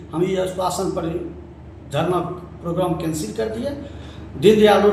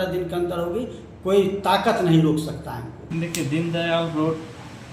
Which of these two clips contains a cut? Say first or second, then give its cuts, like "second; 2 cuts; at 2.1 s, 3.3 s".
second; 1 cut; at 2.9 s